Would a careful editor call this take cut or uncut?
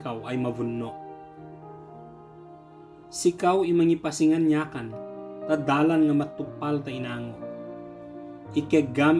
cut